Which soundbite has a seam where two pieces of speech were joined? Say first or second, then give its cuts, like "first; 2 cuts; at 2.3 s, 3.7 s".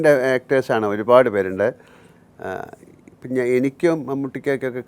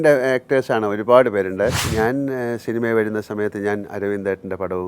second; 1 cut; at 1.8 s